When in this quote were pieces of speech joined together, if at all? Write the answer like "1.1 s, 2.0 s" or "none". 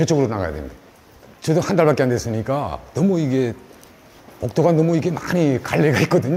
none